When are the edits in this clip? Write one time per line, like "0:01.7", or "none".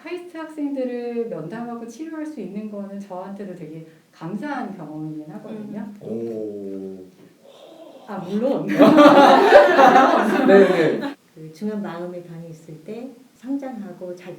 0:06.0
0:11.1
0:13.3